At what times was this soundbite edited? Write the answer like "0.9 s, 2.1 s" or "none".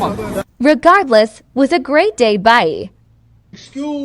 1.4 s